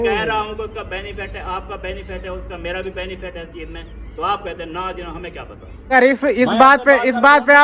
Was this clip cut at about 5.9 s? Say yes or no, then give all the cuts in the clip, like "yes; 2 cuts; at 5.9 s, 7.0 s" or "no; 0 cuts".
yes; 1 cut; at 5.9 s